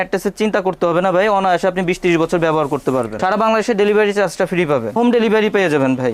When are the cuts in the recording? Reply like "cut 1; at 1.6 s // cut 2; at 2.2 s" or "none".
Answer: cut 1; at 3.1 s // cut 2; at 5.0 s